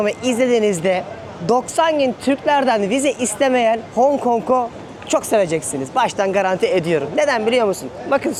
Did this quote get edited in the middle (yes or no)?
no